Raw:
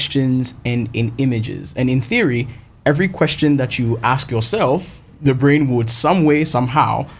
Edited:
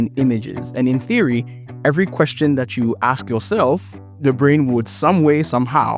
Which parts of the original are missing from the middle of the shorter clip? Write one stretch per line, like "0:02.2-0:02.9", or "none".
none